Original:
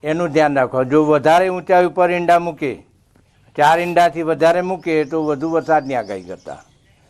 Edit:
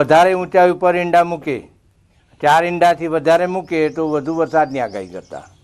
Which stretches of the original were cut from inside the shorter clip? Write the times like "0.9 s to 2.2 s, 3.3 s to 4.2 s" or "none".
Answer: none